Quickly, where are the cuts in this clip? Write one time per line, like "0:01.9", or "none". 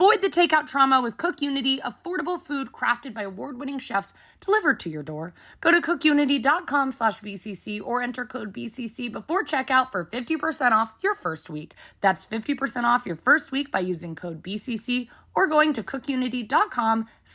none